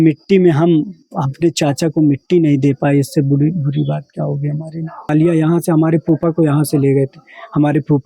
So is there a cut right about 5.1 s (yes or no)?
yes